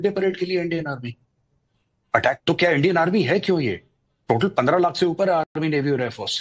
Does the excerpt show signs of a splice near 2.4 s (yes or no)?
yes